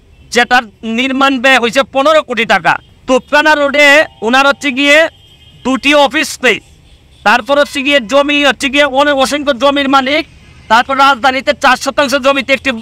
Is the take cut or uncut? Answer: uncut